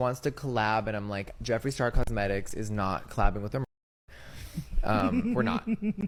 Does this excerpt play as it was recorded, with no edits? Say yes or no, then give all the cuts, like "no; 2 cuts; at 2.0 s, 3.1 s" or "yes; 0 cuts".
yes; 0 cuts